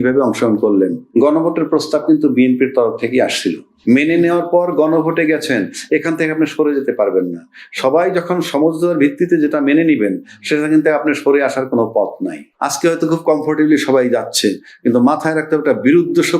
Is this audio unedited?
no; 3 cuts; at 1.0 s, 3.7 s, 12.5 s

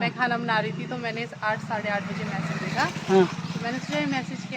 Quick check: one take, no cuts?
yes; 0 cuts

